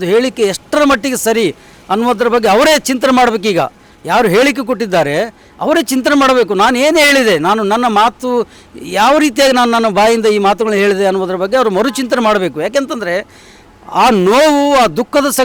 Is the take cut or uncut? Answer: uncut